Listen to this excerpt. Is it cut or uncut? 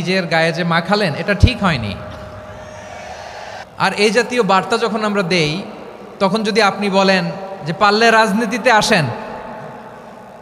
cut